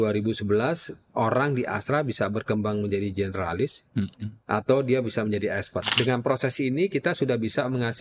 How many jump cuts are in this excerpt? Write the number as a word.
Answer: one